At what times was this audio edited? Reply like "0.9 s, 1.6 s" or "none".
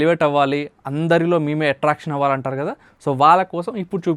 none